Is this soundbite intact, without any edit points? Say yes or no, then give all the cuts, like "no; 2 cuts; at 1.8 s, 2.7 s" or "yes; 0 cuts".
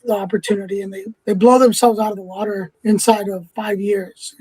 no; 3 cuts; at 1.0 s, 2.7 s, 3.5 s